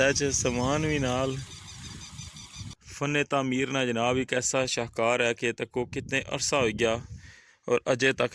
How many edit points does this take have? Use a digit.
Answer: 1